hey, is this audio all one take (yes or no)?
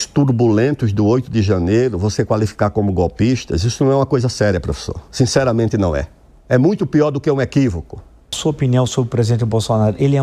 no